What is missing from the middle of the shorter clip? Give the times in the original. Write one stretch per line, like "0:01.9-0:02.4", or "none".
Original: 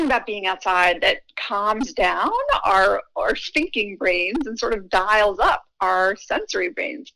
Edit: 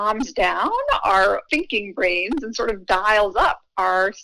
0:03.1-0:03.5